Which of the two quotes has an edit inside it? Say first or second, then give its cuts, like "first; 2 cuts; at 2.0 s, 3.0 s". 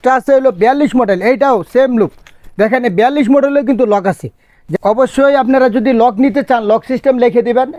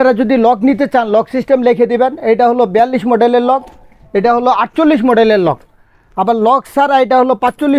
first; 1 cut; at 4.6 s